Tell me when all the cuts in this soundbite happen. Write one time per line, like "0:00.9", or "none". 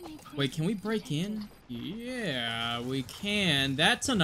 0:01.6